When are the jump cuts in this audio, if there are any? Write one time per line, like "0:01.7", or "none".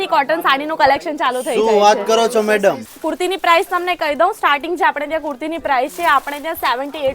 0:02.9